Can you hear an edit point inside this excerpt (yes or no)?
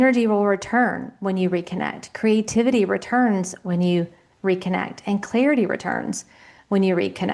no